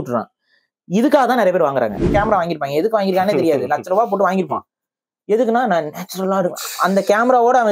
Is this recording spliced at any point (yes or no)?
yes